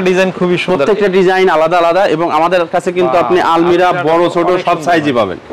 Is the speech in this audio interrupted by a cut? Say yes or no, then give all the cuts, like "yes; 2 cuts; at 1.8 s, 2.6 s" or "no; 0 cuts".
no; 0 cuts